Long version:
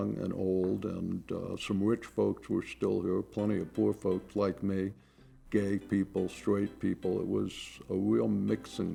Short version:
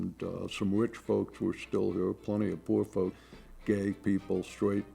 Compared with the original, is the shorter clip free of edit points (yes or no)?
no